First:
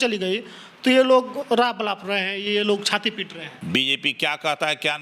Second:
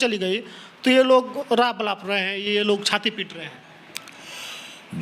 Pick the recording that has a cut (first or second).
first